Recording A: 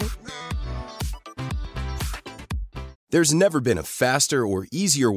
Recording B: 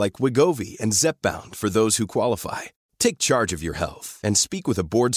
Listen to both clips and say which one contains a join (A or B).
A